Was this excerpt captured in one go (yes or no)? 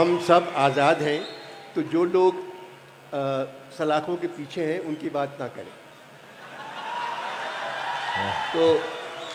yes